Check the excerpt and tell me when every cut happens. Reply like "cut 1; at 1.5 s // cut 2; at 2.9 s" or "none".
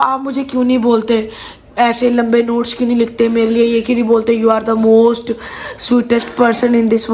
none